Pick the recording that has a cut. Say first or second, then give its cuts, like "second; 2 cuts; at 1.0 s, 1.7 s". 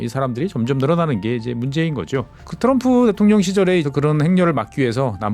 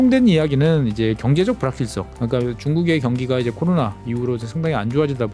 first; 2 cuts; at 2.4 s, 3.9 s